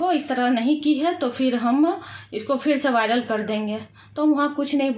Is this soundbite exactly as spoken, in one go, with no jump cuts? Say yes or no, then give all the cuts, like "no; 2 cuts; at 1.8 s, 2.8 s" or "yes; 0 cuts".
yes; 0 cuts